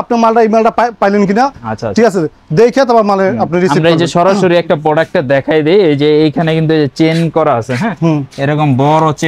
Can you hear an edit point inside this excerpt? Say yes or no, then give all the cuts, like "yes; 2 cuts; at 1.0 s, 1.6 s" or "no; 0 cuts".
no; 0 cuts